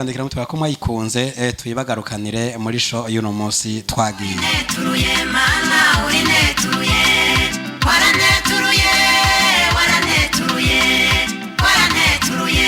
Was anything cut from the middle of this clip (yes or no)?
no